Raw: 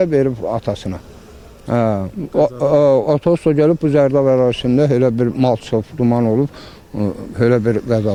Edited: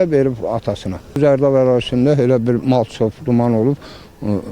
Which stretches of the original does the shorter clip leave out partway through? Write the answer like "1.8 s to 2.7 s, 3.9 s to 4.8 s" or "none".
1.2 s to 3.9 s